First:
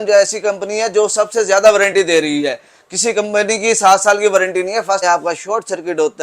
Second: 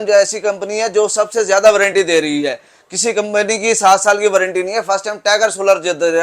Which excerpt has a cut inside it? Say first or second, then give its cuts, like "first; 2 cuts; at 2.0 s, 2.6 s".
first; 1 cut; at 5.0 s